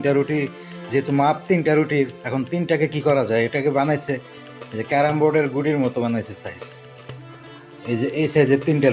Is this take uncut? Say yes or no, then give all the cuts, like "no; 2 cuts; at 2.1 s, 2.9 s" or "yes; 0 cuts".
yes; 0 cuts